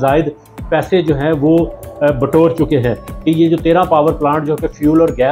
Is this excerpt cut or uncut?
cut